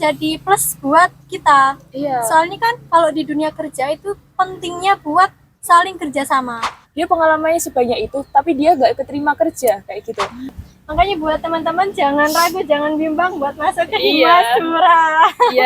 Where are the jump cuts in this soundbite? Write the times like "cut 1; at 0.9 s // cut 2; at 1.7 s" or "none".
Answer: cut 1; at 6.8 s // cut 2; at 10.4 s